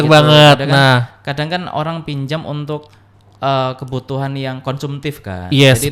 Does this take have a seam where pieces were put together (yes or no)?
no